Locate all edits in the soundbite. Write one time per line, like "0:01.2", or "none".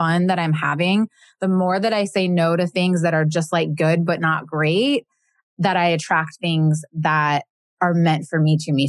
0:07.6